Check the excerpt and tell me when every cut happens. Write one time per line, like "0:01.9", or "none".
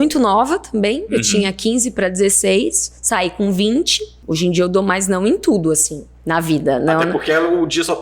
0:04.2